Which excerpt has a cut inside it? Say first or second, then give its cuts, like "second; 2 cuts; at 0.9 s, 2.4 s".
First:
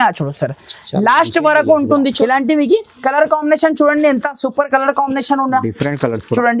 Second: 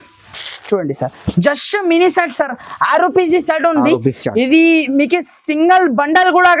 first; 1 cut; at 2.2 s